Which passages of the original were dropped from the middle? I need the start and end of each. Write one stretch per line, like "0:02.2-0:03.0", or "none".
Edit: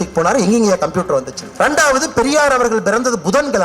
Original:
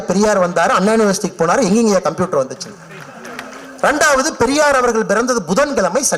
0:02.6-0:03.6